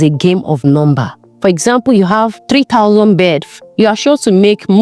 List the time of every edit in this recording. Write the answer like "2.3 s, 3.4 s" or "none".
1.3 s, 2.4 s, 3.5 s

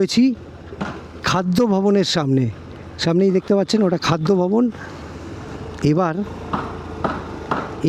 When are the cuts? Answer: none

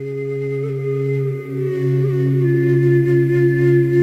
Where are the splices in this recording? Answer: none

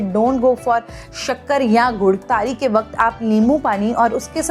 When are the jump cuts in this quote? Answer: 2.2 s

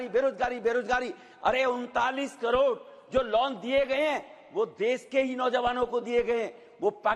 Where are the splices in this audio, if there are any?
none

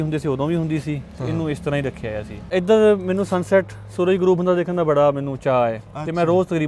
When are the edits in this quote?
2.5 s

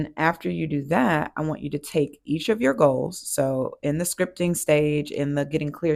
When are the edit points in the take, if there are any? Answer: none

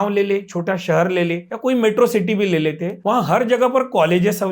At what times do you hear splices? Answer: 1.5 s, 2.9 s

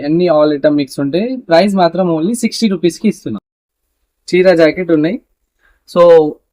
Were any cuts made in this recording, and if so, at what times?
3.6 s

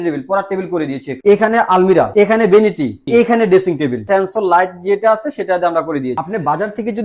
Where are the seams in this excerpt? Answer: 1.1 s, 2.1 s, 3.0 s, 4.0 s, 6.2 s

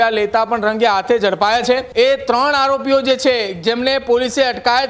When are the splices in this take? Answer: 1.9 s

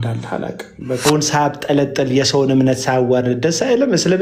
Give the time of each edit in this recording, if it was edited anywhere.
1.0 s

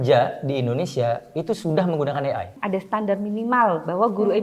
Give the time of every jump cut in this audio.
2.6 s

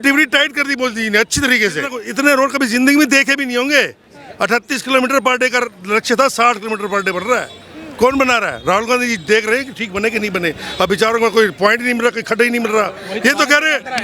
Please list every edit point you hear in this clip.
2.0 s

